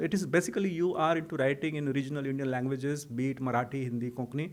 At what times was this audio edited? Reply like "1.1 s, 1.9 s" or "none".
none